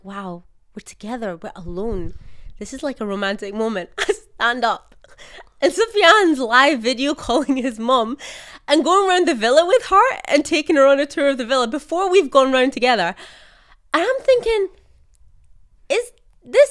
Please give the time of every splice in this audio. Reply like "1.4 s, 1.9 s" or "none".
none